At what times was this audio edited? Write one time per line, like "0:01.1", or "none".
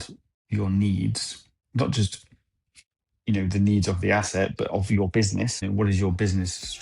0:05.6